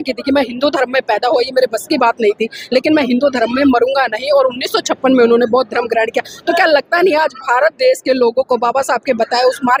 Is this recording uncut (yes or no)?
yes